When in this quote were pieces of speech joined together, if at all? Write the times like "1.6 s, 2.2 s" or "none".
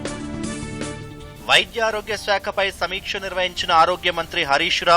1.2 s